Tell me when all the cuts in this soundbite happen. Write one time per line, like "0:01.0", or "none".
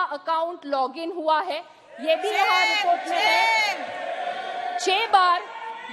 none